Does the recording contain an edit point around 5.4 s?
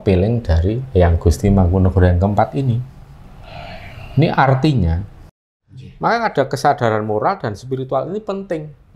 yes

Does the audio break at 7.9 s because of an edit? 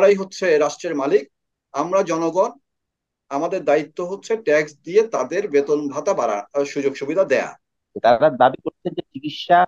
yes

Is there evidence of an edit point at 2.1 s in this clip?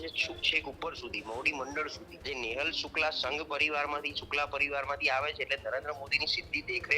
yes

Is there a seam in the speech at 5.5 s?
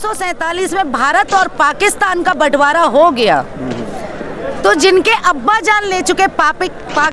no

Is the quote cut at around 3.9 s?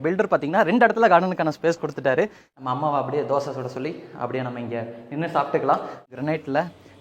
no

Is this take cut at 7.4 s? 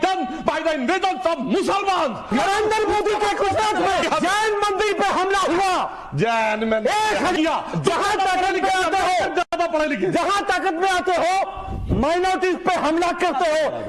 yes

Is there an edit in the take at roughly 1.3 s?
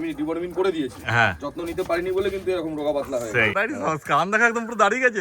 no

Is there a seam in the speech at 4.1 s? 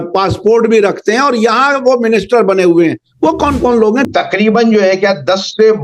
yes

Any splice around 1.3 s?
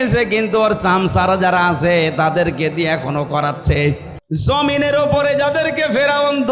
no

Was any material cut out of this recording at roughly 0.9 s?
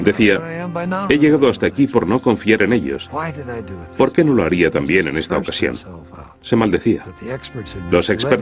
no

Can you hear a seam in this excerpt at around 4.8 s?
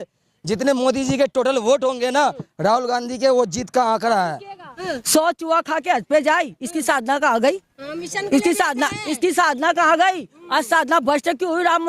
yes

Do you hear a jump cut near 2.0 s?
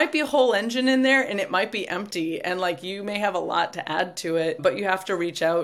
no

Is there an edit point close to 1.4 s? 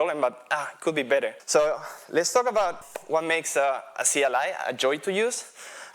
yes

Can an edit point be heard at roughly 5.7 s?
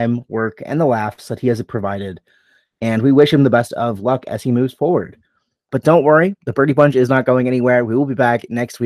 yes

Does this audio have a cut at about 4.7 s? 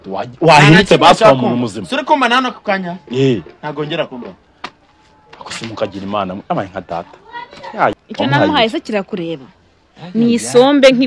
no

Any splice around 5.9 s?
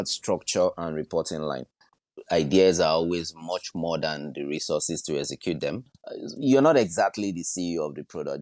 yes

